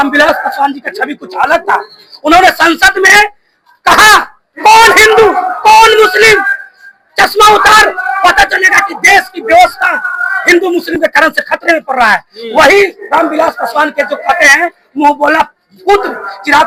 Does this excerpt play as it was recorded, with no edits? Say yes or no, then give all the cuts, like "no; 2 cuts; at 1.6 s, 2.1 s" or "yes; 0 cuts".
yes; 0 cuts